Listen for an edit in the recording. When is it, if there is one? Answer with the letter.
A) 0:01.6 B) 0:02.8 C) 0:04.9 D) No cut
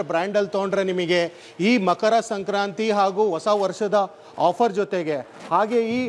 D